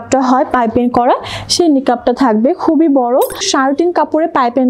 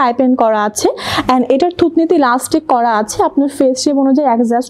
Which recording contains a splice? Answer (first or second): first